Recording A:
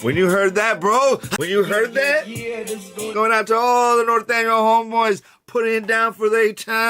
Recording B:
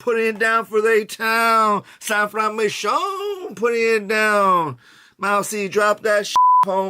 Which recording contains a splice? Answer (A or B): A